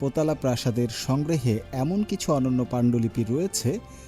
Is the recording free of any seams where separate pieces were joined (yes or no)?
yes